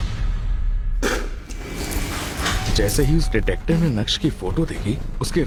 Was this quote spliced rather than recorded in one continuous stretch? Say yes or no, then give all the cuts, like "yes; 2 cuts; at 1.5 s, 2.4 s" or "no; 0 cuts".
no; 0 cuts